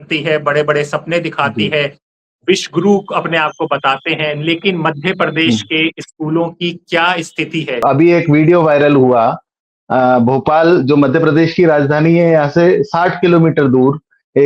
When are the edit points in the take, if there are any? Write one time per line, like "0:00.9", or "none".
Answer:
0:07.8